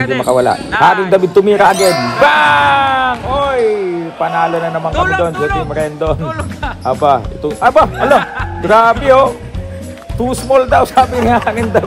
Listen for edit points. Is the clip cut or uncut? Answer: uncut